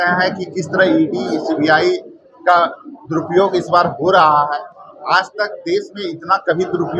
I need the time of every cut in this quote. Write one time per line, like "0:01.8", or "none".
none

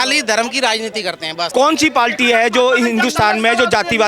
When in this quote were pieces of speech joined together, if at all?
0:01.5

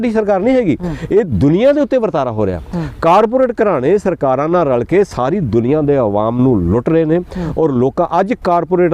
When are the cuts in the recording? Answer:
none

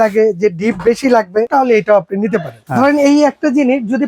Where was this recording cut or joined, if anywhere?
0:01.5
0:02.6

